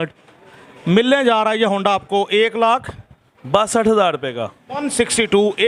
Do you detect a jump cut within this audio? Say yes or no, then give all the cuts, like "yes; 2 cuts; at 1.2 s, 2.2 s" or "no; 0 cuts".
no; 0 cuts